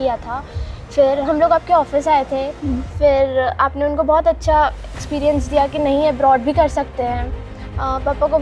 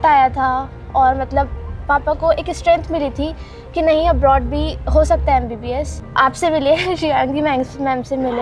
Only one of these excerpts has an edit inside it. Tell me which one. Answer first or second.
second